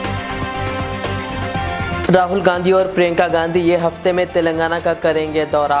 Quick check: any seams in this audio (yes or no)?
yes